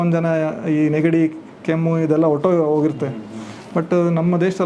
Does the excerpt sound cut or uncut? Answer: uncut